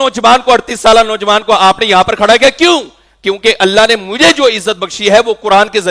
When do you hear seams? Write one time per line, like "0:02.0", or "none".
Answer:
none